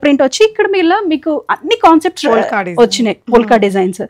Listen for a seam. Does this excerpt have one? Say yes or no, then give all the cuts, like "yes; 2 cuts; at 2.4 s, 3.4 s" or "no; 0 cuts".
no; 0 cuts